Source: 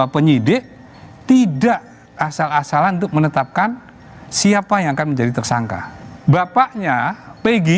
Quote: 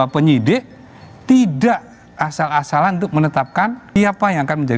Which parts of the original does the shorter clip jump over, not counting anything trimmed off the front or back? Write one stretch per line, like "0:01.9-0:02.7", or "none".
0:03.8-0:04.3

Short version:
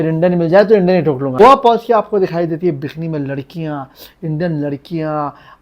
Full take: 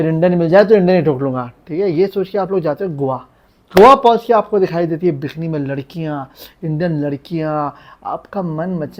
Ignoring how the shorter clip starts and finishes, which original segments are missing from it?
0:01.4-0:03.8

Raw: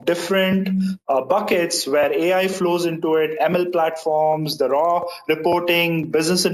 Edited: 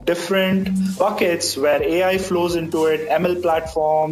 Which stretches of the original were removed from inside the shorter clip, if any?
0:01.0-0:01.2

